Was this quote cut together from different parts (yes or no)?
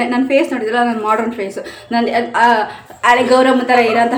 no